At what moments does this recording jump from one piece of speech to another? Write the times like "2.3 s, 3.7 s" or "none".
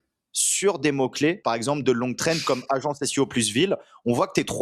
1.4 s